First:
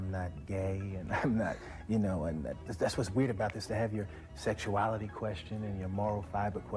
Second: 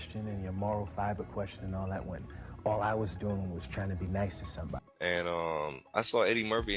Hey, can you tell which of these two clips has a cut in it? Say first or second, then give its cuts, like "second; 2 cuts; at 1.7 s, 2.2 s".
second; 1 cut; at 4.8 s